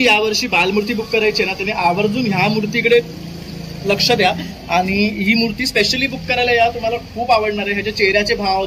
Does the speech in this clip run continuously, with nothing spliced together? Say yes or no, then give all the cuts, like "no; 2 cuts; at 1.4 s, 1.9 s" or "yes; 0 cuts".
yes; 0 cuts